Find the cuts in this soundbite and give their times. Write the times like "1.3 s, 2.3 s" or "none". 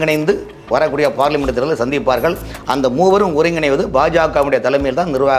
none